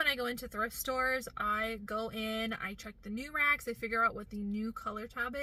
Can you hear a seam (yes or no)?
no